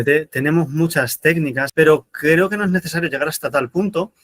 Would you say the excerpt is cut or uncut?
cut